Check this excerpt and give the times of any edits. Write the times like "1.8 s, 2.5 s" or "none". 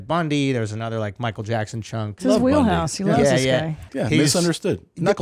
2.1 s, 3.9 s